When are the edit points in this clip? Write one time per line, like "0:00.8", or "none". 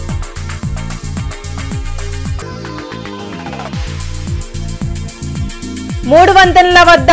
0:03.7
0:05.2